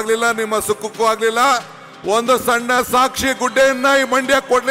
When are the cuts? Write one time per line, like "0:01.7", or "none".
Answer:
none